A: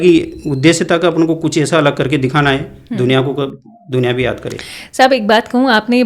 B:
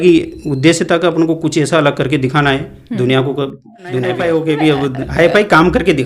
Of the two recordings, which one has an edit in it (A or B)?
B